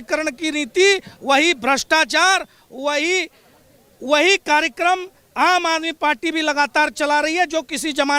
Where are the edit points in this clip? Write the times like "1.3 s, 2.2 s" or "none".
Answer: none